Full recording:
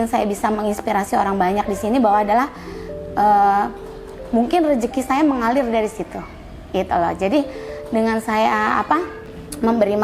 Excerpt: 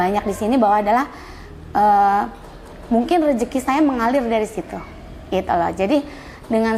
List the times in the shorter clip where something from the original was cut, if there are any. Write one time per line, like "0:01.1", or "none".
none